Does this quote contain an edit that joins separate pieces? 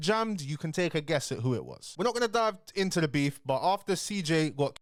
no; 0 cuts

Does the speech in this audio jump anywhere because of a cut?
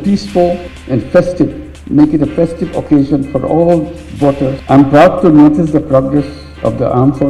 yes; 1 cut; at 4.6 s

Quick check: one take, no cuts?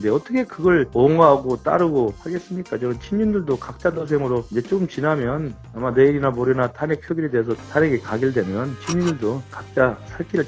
yes; 0 cuts

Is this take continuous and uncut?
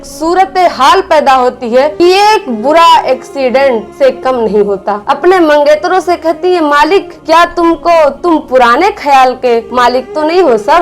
no; 3 cuts; at 1.9 s, 5.1 s, 9.7 s

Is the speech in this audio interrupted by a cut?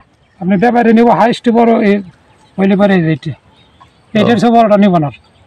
no; 0 cuts

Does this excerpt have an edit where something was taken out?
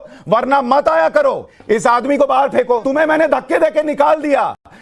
yes; 2 cuts; at 1.5 s, 2.8 s

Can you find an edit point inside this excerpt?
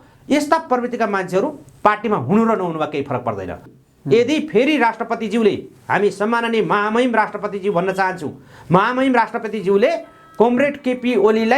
yes; 1 cut; at 3.7 s

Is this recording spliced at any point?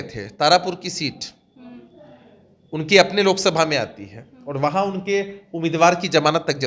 no; 0 cuts

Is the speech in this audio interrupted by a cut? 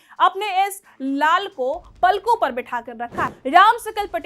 yes; 1 cut; at 3.3 s

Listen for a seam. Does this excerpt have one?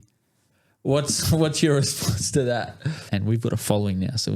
yes; 1 cut; at 3.0 s

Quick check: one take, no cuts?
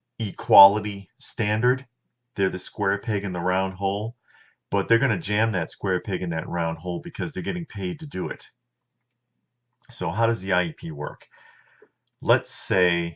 yes; 0 cuts

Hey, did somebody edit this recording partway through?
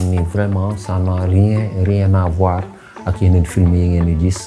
no; 0 cuts

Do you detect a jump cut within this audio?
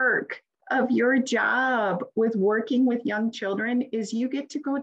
no; 0 cuts

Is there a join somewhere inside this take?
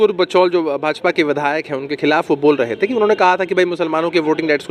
no; 0 cuts

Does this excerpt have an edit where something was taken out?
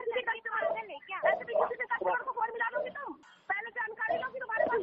yes; 1 cut; at 3.3 s

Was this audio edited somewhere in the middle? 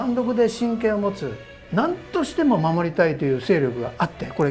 yes; 1 cut; at 1.6 s

